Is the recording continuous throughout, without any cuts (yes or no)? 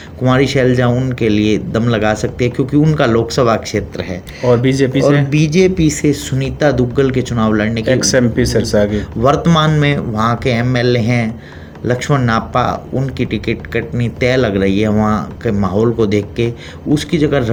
yes